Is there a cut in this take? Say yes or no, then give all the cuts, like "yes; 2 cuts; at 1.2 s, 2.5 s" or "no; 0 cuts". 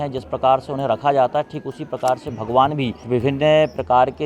yes; 1 cut; at 3.0 s